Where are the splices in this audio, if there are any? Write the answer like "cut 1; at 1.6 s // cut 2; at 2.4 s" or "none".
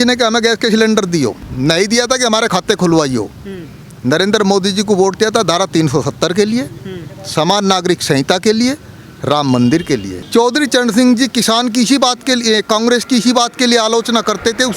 cut 1; at 1.4 s // cut 2; at 10.2 s